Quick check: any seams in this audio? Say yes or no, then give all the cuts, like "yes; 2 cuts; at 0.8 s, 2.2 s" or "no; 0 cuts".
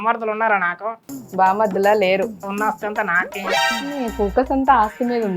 yes; 2 cuts; at 2.4 s, 3.6 s